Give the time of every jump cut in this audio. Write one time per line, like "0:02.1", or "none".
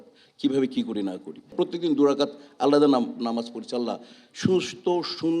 0:01.5